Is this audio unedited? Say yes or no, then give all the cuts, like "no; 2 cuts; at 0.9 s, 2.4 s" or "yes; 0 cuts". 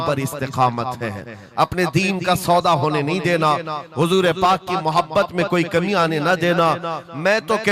yes; 0 cuts